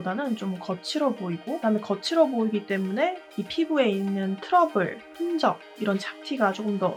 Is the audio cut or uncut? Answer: uncut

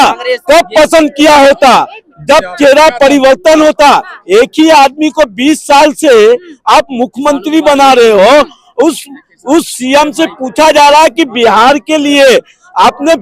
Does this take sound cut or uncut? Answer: uncut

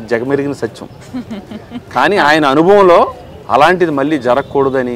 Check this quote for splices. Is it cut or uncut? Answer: uncut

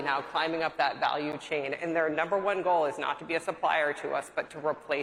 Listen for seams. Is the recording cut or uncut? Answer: uncut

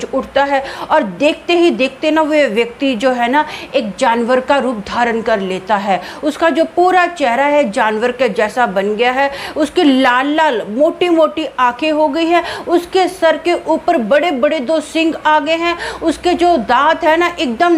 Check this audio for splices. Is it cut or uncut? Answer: uncut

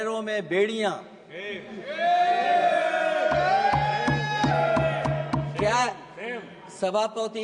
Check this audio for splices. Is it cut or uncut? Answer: uncut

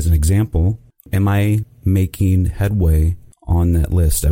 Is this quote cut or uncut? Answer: cut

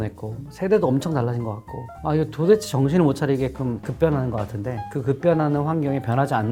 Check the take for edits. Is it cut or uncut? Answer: uncut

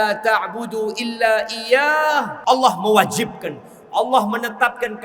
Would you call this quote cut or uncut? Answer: cut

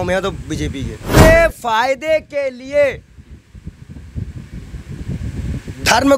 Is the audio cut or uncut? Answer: cut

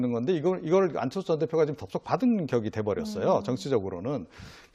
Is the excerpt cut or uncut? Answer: uncut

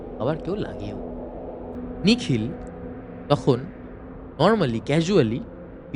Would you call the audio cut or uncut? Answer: cut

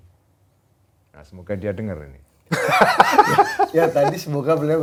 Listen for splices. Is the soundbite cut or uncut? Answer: uncut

